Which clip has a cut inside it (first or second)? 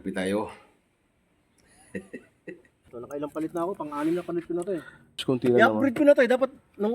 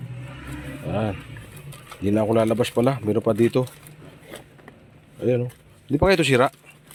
first